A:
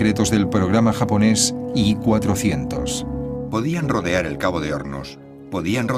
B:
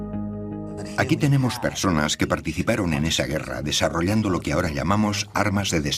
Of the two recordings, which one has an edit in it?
B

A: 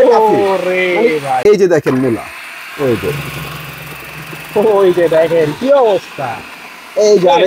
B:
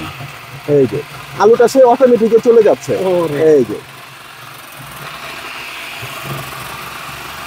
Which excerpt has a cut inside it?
A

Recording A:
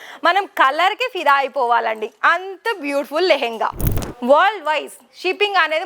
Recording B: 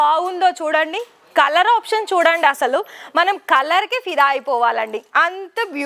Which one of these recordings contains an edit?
A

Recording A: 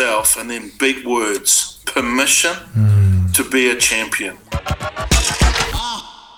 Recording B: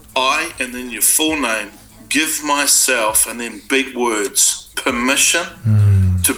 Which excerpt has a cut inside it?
A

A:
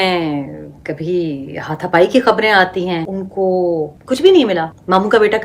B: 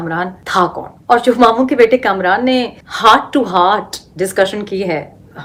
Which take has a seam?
A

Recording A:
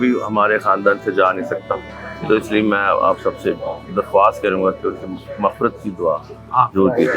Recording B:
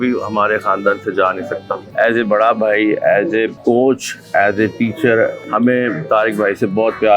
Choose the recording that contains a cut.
B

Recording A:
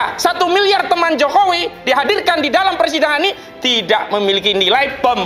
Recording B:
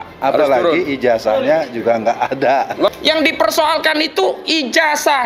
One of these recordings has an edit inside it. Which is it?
B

